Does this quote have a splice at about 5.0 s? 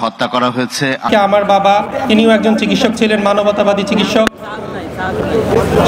no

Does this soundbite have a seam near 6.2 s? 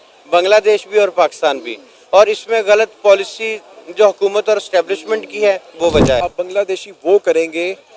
yes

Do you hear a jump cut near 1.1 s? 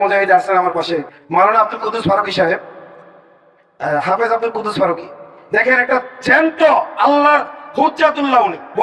yes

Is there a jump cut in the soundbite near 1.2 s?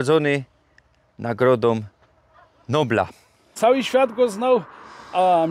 no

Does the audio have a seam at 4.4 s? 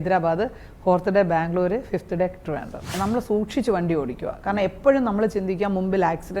no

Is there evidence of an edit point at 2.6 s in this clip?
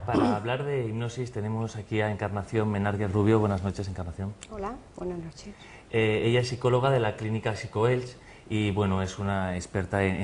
no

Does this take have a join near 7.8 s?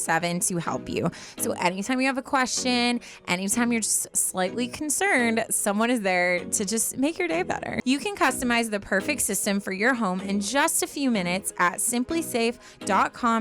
yes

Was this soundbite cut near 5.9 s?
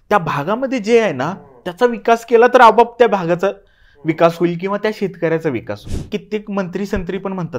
yes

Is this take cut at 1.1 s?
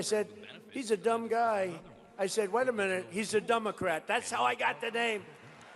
yes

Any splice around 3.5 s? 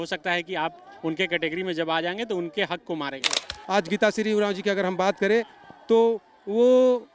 yes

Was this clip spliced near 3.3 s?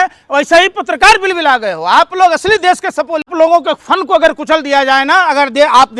yes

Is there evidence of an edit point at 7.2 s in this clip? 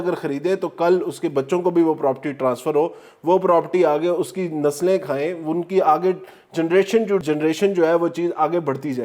yes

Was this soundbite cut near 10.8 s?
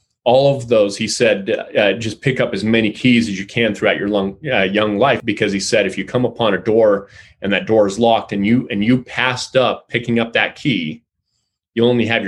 no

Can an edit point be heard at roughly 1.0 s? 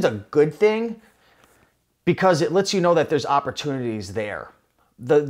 no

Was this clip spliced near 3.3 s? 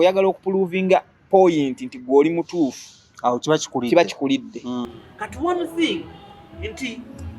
no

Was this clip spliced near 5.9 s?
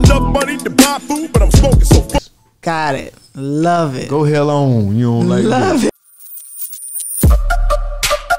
yes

